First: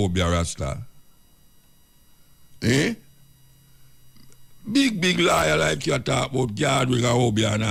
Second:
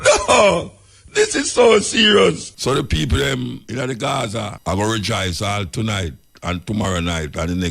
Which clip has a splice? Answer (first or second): second